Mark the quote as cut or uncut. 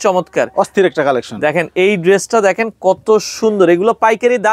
uncut